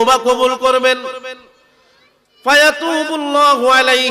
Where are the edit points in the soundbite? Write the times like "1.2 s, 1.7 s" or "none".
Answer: none